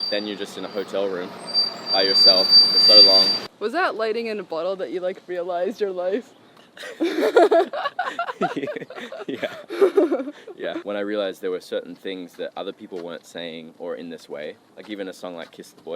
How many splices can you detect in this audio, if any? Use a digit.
2